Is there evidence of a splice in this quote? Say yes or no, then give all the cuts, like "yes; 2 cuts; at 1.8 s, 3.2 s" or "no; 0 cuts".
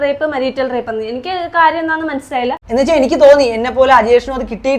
yes; 1 cut; at 2.6 s